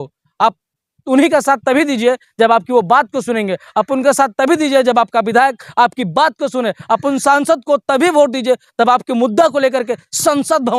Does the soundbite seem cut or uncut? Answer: uncut